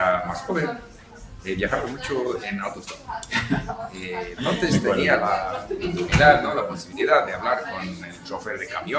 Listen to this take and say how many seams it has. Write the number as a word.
zero